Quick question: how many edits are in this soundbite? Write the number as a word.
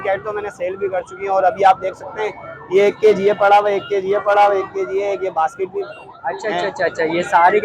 zero